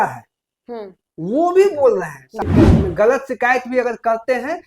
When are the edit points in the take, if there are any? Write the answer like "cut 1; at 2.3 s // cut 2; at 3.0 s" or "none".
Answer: cut 1; at 2.4 s